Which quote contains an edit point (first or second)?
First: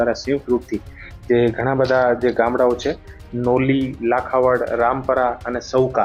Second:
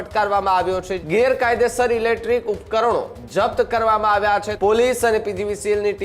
second